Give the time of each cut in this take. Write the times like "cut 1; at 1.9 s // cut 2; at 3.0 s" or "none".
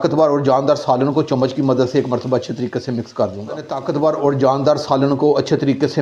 none